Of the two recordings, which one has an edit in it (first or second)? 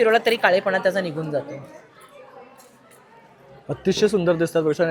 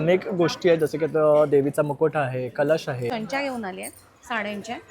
second